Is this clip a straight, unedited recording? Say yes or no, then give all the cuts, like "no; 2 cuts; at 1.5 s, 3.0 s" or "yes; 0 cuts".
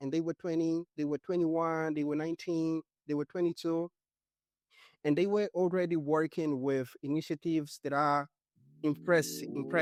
yes; 0 cuts